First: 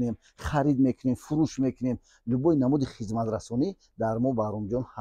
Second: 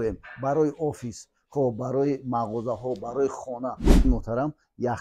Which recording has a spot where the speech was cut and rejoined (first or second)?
second